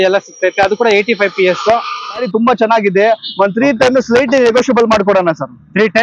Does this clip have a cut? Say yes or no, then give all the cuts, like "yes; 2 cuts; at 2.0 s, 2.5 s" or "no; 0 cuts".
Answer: yes; 1 cut; at 2.3 s